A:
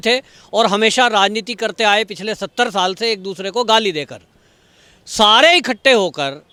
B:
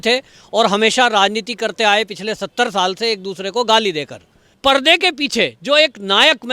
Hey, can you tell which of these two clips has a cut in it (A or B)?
B